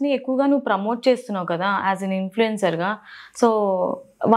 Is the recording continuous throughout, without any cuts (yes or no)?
yes